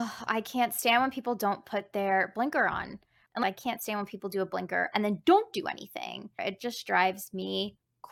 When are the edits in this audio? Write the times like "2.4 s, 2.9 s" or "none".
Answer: 3.3 s, 6.3 s